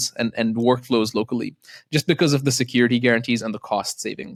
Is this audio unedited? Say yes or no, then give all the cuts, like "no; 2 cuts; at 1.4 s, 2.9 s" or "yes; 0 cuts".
yes; 0 cuts